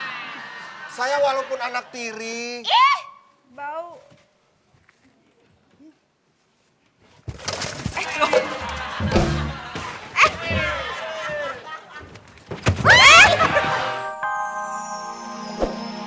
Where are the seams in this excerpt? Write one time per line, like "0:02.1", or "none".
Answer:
0:13.8